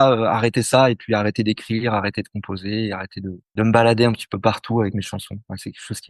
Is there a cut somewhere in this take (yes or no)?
no